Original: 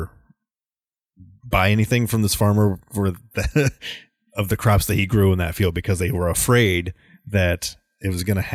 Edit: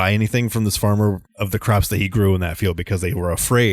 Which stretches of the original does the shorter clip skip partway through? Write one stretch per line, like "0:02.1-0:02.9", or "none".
0:02.8-0:04.2

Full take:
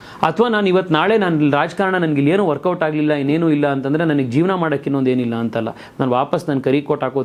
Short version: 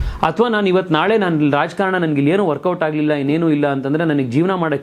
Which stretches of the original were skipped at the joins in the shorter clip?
none

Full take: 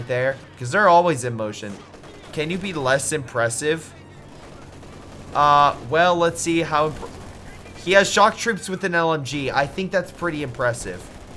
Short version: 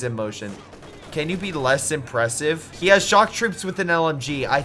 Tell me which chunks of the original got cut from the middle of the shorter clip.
0:03.9-0:07.7

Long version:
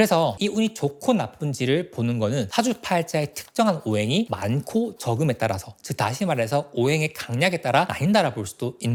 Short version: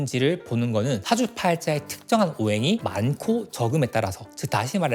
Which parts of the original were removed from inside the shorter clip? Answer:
none

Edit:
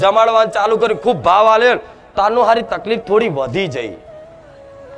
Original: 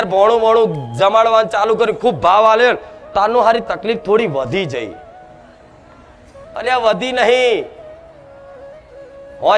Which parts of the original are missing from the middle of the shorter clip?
0:05.0-0:07.7

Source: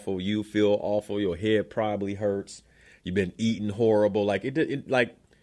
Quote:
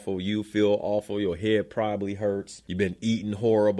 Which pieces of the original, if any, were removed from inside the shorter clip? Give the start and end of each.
0:02.6-0:02.9

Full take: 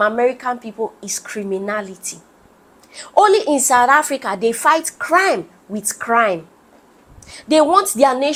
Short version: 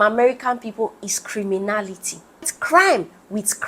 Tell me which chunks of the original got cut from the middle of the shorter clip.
0:02.6-0:04.9

